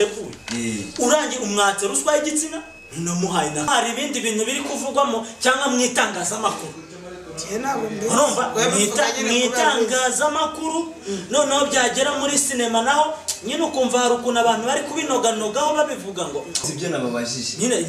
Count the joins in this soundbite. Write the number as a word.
two